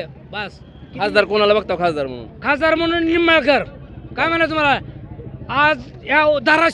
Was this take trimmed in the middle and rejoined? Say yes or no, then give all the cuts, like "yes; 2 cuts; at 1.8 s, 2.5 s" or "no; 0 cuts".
no; 0 cuts